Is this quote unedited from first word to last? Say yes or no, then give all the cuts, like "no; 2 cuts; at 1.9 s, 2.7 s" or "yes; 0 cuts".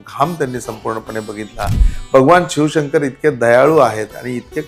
no; 1 cut; at 1.9 s